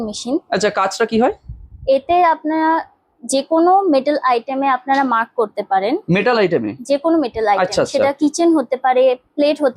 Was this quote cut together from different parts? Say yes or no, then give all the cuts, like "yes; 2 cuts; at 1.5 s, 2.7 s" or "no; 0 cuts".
no; 0 cuts